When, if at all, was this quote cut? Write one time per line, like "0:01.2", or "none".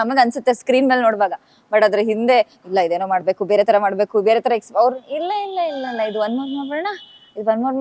none